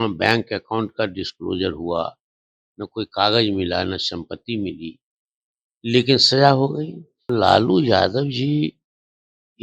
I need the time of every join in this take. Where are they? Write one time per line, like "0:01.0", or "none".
0:07.3